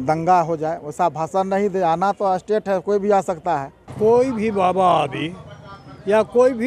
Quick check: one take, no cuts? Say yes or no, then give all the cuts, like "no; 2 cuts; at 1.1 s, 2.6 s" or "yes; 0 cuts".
no; 1 cut; at 3.8 s